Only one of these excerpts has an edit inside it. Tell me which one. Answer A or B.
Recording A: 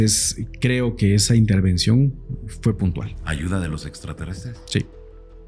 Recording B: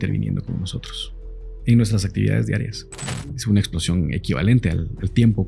B